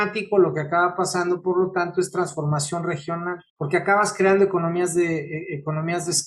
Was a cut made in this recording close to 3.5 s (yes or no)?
yes